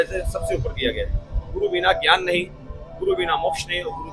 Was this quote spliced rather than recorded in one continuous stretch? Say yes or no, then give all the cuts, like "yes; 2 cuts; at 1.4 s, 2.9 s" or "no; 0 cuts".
no; 0 cuts